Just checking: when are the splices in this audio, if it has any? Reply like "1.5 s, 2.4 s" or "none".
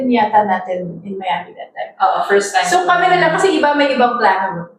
none